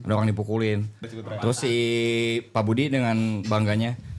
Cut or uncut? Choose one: cut